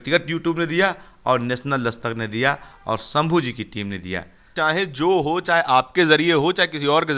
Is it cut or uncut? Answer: cut